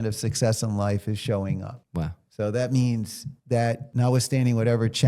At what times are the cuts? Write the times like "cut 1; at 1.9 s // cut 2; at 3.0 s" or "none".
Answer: cut 1; at 2.0 s // cut 2; at 3.8 s